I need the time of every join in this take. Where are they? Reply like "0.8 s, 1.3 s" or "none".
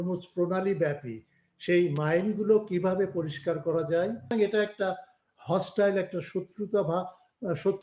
4.3 s